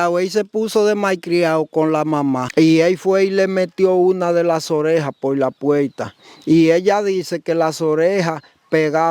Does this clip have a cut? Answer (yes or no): yes